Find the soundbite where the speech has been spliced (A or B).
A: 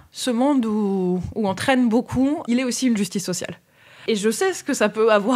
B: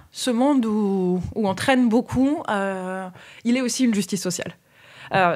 A